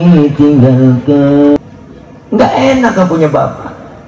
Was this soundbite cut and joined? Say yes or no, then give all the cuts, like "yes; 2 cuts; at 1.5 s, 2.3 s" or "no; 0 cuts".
yes; 1 cut; at 1.6 s